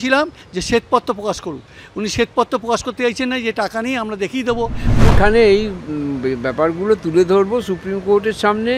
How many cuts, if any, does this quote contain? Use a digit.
1